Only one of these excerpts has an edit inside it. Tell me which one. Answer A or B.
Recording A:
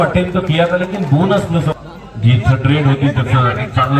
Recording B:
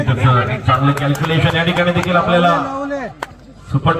A